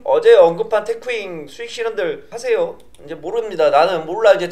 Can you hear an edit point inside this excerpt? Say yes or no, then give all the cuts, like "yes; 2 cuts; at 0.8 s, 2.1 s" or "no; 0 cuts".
no; 0 cuts